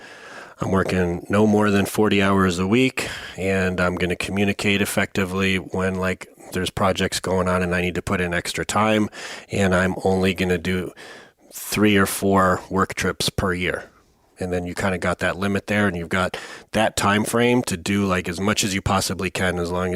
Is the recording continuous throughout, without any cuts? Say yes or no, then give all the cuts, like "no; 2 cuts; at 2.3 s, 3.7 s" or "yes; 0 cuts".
yes; 0 cuts